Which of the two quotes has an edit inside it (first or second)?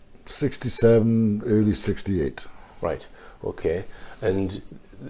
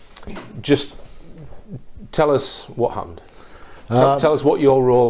first